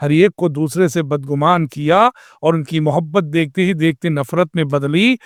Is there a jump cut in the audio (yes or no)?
no